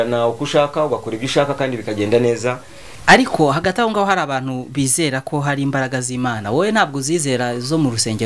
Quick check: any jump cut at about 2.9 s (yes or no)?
yes